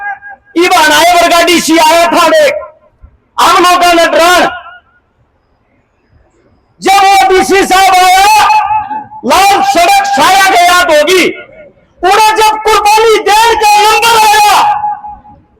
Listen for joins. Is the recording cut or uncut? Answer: uncut